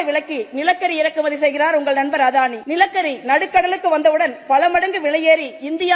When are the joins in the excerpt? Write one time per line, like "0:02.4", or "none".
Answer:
0:02.6